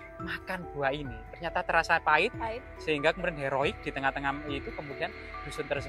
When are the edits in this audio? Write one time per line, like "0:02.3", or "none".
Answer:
none